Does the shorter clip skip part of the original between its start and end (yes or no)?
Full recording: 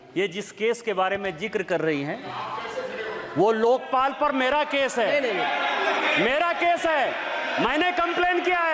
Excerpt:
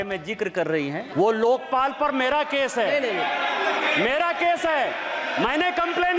yes